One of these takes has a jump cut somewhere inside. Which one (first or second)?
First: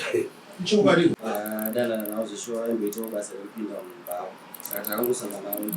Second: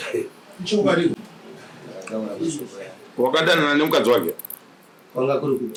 first